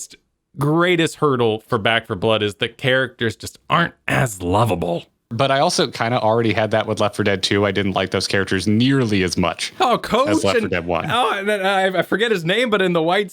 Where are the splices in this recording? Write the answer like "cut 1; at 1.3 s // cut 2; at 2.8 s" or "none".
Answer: cut 1; at 5.3 s